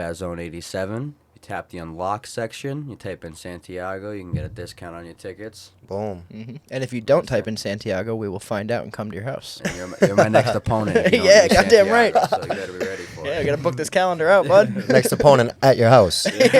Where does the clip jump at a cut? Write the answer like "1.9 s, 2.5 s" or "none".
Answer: none